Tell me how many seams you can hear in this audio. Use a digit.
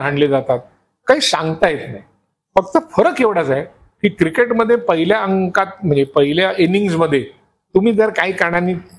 0